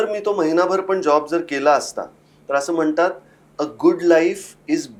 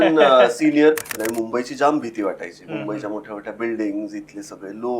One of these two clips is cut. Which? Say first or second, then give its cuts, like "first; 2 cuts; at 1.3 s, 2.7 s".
second; 1 cut; at 1.2 s